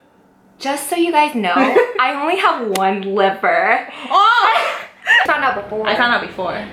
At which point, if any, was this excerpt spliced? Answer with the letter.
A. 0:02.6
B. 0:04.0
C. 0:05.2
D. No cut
C